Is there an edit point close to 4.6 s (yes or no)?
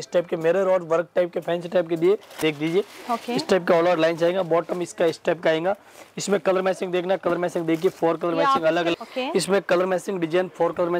no